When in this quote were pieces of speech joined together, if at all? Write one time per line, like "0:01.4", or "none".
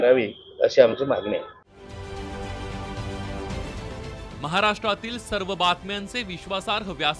none